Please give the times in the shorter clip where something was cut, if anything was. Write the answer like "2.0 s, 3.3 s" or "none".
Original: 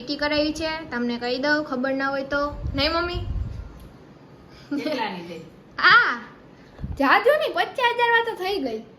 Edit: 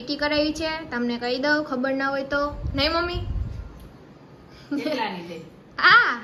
none